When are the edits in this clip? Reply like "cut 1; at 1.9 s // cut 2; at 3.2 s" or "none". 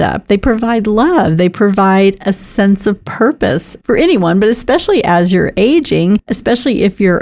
cut 1; at 6.3 s